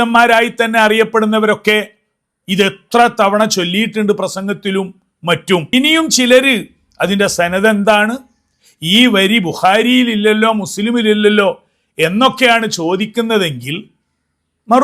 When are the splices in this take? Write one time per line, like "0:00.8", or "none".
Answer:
0:05.7